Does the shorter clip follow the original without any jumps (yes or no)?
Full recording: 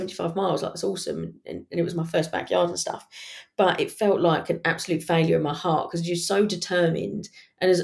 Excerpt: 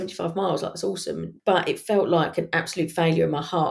no